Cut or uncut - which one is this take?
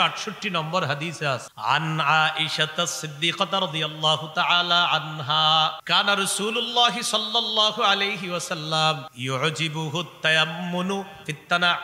cut